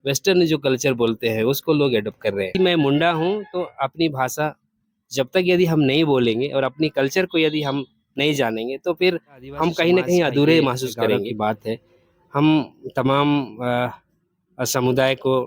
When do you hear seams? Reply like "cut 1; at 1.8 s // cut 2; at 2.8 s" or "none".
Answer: cut 1; at 2.5 s // cut 2; at 11.3 s

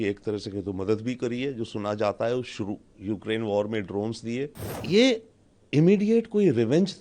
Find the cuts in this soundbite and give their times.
cut 1; at 4.7 s

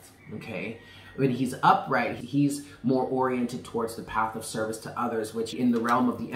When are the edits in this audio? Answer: cut 1; at 2.1 s // cut 2; at 5.5 s

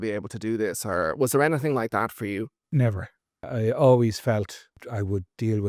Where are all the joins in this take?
cut 1; at 3.5 s // cut 2; at 4.8 s

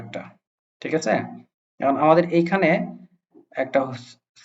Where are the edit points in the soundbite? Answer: none

